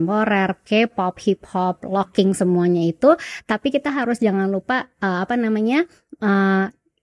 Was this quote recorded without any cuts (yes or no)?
yes